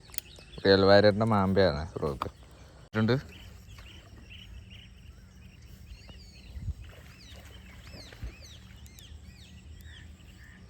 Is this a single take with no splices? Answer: no; 1 cut; at 2.9 s

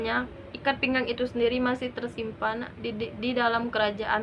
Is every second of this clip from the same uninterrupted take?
yes; 0 cuts

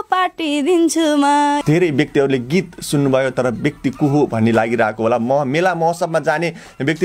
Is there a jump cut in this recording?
yes; 1 cut; at 1.6 s

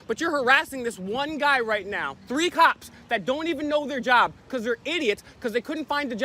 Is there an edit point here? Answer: yes; 1 cut; at 2.3 s

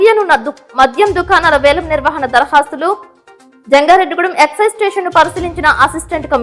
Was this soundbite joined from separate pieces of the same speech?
no; 0 cuts

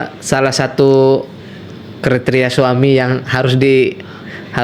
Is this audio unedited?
yes; 0 cuts

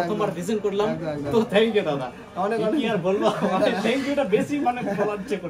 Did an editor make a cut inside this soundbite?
no; 0 cuts

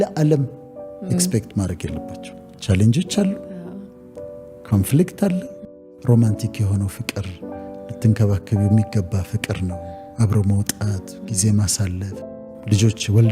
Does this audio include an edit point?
yes; 2 cuts; at 5.6 s, 12.1 s

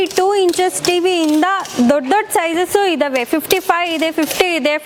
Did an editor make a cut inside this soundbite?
no; 0 cuts

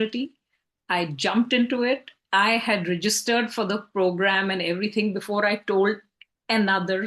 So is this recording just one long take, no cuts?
yes; 0 cuts

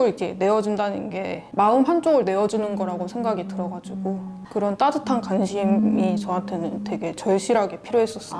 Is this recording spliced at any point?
no; 0 cuts

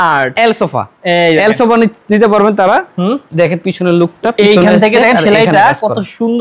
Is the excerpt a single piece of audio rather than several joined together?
yes; 0 cuts

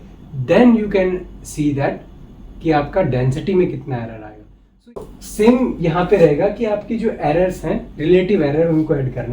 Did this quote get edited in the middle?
yes; 1 cut; at 4.9 s

